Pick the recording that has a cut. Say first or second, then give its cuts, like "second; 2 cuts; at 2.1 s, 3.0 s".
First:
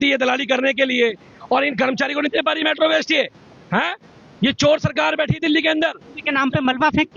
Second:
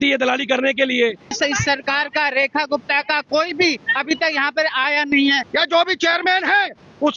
second; 2 cuts; at 1.4 s, 5.4 s